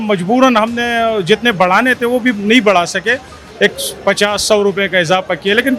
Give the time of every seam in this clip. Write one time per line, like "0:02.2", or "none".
none